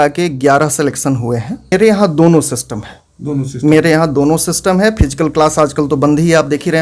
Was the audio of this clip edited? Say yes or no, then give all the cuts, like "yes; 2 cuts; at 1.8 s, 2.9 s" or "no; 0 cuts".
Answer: yes; 1 cut; at 1.7 s